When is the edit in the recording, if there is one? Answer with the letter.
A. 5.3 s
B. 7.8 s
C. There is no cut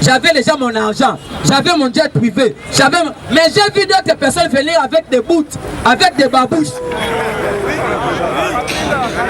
C